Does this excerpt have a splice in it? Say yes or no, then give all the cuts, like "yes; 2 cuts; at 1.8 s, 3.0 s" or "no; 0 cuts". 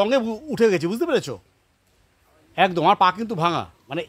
no; 0 cuts